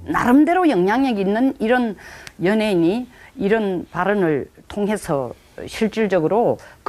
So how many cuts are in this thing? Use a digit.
1